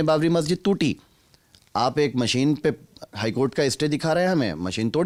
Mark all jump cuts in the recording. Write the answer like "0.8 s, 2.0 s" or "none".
none